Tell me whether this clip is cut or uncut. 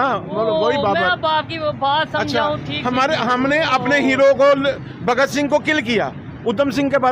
uncut